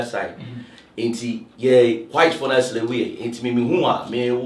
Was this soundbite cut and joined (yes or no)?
no